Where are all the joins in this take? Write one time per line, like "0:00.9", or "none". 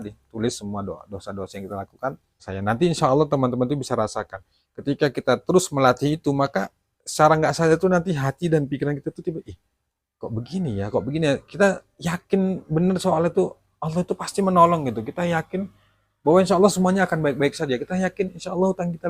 0:02.5